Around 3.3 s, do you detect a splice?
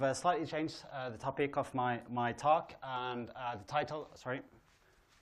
yes; 1 cut; at 3.3 s

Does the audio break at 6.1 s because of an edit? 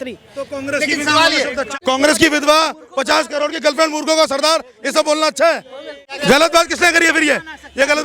yes; 2 cuts; at 1.7 s, 6.1 s

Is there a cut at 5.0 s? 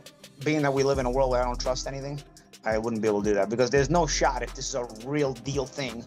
no; 0 cuts

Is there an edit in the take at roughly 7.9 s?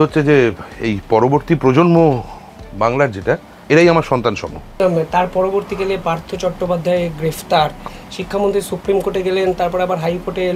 yes; 3 cuts; at 3.5 s, 4.6 s, 7.9 s

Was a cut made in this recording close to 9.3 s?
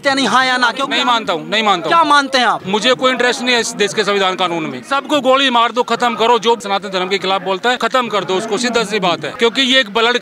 yes; 6 cuts; at 0.8 s, 2.6 s, 4.8 s, 6.6 s, 7.8 s, 9.3 s

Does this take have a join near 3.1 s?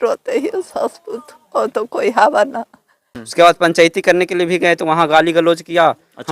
yes; 1 cut; at 3.1 s

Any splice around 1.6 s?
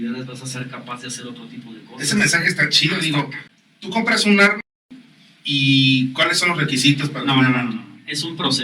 no; 1 cut; at 3.4 s

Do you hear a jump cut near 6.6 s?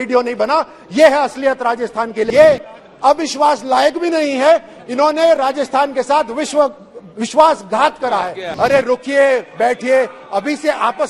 no; 2 cuts; at 2.3 s, 8.4 s

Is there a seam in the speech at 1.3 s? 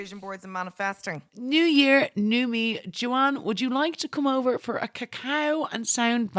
yes; 1 cut; at 1.3 s

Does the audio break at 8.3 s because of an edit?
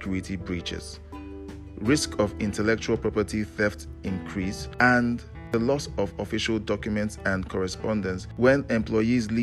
yes; 3 cuts; at 4.6 s, 5.3 s, 8.3 s

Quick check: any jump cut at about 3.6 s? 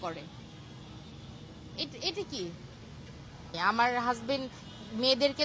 yes; 1 cut; at 3.6 s

